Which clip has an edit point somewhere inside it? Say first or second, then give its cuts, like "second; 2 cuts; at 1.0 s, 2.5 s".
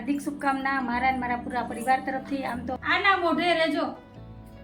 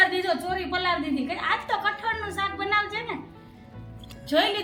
first; 1 cut; at 2.8 s